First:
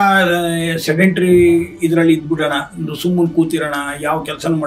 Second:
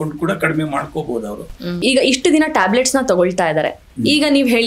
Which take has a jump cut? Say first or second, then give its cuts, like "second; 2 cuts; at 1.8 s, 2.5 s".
second; 1 cut; at 1.8 s